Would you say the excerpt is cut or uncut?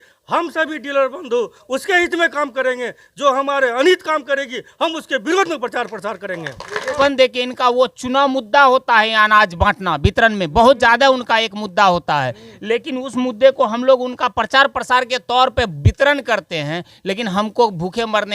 cut